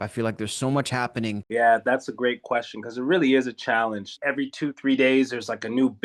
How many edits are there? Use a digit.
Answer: 3